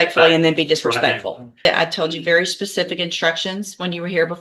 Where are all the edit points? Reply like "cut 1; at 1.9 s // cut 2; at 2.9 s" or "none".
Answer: cut 1; at 1.6 s